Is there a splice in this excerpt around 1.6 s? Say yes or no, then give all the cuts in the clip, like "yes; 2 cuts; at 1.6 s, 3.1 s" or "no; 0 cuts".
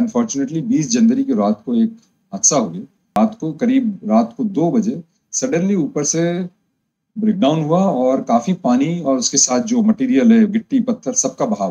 no; 1 cut; at 2.9 s